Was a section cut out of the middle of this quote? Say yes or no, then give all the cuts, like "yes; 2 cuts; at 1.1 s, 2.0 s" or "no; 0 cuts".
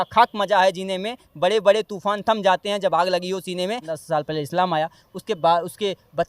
yes; 1 cut; at 3.9 s